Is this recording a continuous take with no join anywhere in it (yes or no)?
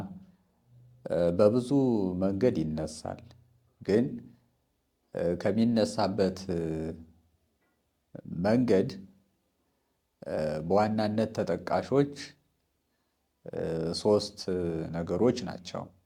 yes